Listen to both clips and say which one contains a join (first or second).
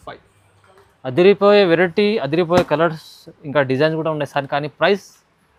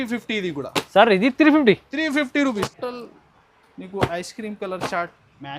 second